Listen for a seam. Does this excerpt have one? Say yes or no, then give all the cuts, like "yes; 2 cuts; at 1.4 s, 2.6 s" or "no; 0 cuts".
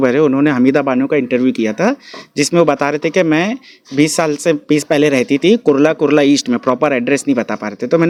no; 0 cuts